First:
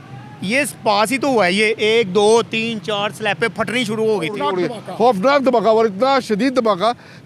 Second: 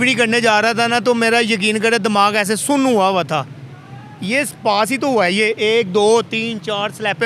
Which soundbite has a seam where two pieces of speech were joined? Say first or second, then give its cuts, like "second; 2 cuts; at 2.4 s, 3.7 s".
first; 1 cut; at 4.4 s